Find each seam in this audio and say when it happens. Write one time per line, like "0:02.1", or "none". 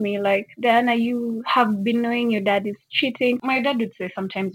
0:03.4